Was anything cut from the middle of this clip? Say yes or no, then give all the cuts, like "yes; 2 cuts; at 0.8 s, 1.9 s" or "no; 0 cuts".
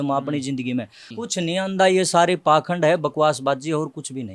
yes; 1 cut; at 1.1 s